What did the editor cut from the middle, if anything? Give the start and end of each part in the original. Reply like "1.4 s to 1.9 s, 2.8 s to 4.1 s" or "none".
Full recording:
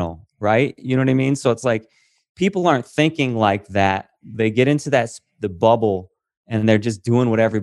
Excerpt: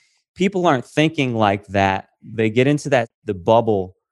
5.2 s to 5.4 s